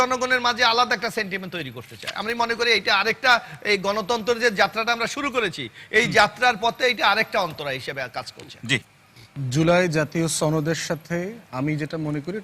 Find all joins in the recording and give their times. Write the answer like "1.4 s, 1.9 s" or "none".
none